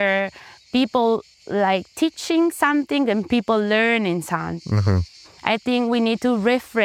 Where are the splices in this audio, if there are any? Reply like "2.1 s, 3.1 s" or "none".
none